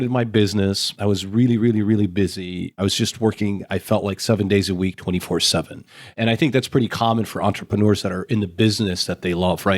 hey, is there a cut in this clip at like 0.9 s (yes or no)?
yes